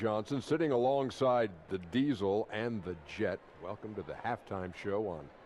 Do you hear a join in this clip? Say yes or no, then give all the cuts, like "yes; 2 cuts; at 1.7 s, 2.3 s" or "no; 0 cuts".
no; 0 cuts